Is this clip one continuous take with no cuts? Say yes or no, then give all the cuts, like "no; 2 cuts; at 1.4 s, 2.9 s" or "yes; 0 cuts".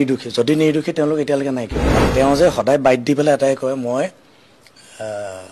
no; 1 cut; at 2.0 s